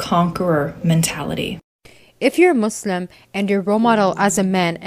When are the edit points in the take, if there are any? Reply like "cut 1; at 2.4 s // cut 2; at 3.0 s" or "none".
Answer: cut 1; at 1.7 s

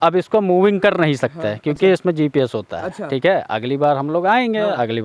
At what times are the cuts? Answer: none

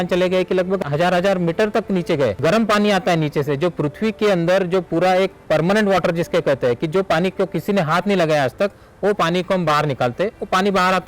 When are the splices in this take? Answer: cut 1; at 0.9 s // cut 2; at 2.4 s

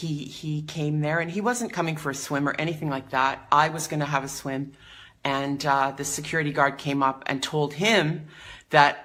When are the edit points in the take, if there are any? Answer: none

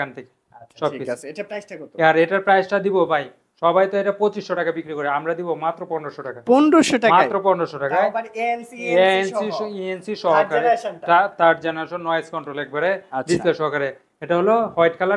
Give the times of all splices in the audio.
none

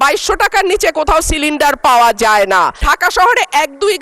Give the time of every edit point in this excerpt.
cut 1; at 2.8 s

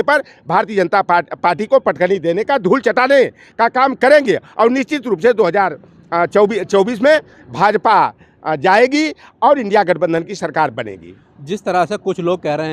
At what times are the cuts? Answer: none

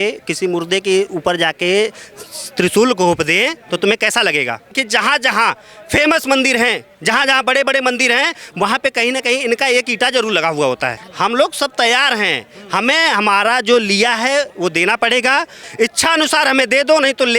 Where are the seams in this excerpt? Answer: cut 1; at 4.8 s // cut 2; at 11.0 s // cut 3; at 15.6 s

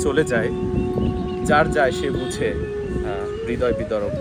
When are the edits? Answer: none

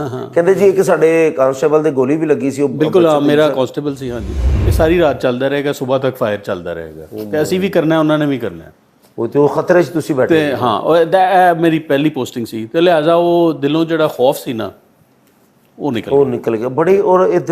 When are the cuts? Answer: cut 1; at 4.4 s

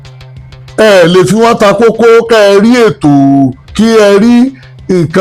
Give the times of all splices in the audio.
none

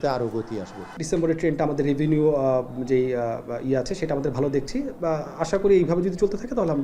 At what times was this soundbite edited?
cut 1; at 0.9 s

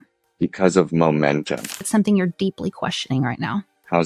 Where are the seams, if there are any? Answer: cut 1; at 1.9 s

